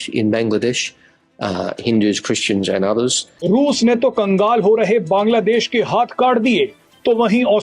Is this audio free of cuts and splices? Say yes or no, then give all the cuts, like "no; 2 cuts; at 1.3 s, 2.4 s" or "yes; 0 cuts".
no; 1 cut; at 3.3 s